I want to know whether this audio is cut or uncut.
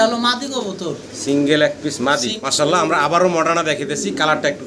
cut